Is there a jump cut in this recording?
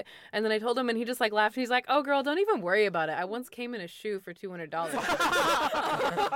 yes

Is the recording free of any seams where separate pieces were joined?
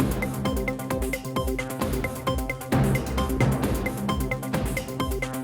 yes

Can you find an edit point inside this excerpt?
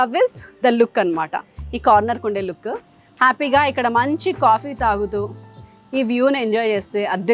no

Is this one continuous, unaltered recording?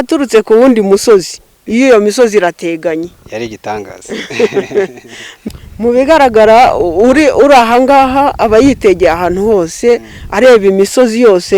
no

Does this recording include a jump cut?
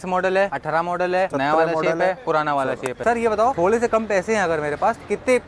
yes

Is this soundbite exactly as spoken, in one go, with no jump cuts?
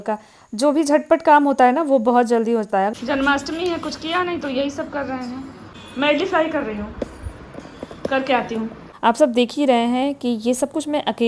no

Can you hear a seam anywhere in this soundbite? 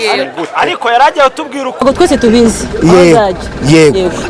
yes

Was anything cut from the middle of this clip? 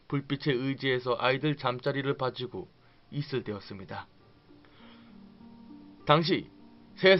no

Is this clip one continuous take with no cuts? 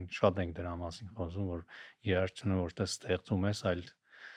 yes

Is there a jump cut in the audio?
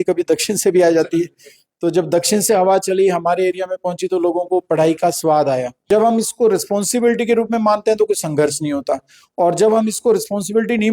yes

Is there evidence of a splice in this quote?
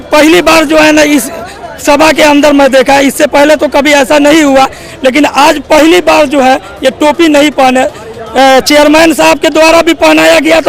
no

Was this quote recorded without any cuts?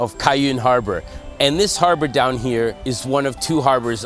yes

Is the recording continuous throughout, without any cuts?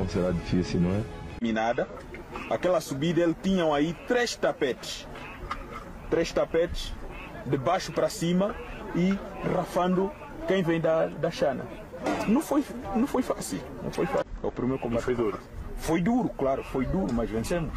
no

